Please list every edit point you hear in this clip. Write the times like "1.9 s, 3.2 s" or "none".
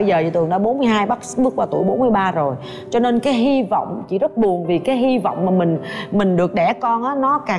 none